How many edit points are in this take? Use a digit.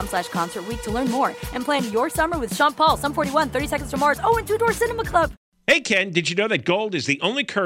1